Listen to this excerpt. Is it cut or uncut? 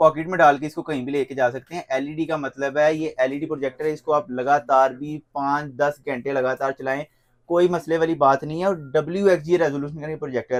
uncut